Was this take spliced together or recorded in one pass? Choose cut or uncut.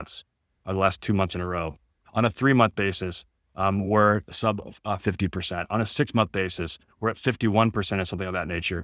uncut